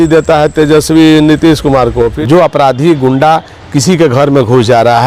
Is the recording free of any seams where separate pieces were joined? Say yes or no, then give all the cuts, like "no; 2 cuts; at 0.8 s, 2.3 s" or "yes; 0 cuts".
no; 1 cut; at 2.2 s